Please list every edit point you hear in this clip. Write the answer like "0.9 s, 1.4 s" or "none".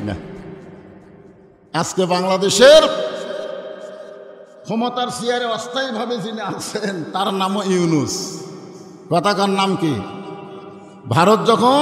1.5 s